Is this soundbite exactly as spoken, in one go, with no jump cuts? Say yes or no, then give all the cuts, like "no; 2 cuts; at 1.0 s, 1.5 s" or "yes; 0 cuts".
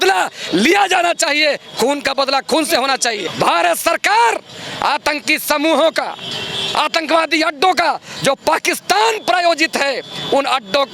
no; 1 cut; at 3.2 s